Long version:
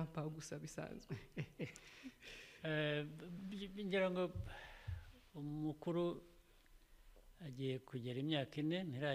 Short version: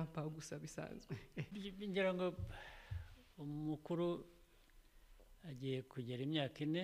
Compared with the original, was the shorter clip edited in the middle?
yes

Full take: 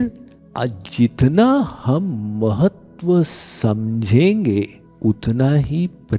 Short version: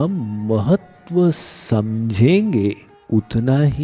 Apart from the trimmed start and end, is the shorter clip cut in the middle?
no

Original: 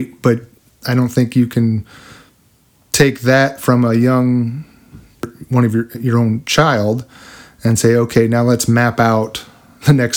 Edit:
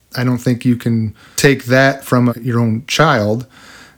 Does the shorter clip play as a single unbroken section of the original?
no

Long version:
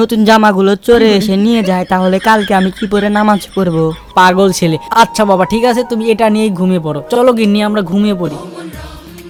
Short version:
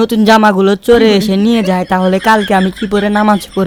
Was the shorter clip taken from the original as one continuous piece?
yes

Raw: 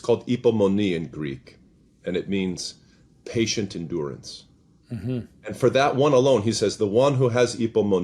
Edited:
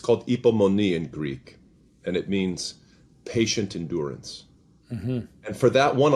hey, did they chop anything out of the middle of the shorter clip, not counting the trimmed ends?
no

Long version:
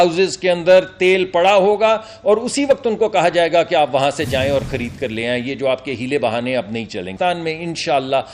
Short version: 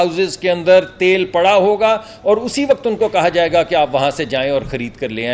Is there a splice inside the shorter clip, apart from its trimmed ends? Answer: no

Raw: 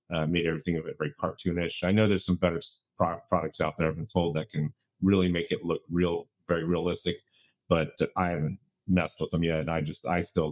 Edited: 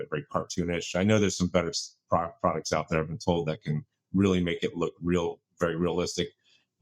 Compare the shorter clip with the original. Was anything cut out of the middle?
no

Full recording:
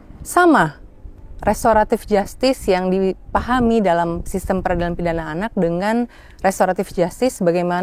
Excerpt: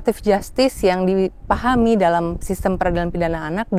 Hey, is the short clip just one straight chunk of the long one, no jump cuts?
yes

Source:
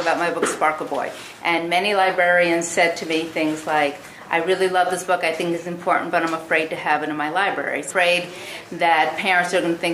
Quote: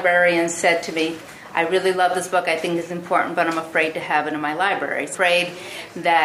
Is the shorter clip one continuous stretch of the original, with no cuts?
no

